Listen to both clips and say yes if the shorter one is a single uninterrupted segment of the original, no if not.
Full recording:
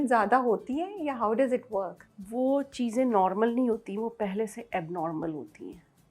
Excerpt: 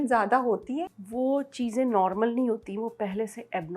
no